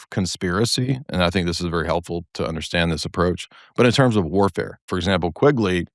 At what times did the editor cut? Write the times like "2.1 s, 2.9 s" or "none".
4.9 s